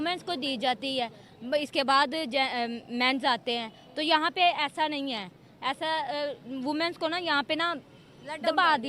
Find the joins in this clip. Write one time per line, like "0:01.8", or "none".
none